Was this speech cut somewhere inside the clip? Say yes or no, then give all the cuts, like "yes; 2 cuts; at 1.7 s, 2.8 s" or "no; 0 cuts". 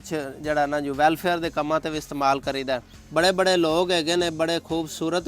yes; 1 cut; at 2.9 s